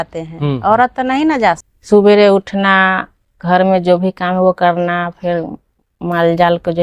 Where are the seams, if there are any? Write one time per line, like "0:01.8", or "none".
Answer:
0:01.7